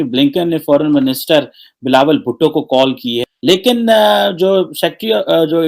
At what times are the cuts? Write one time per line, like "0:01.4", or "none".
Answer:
0:03.1